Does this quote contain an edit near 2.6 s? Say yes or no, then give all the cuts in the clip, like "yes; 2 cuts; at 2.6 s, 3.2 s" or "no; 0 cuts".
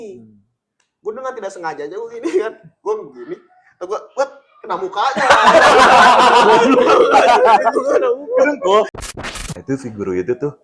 no; 1 cut; at 9.0 s